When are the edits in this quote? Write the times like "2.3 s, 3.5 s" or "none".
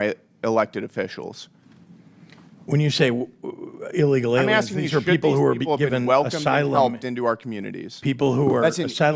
none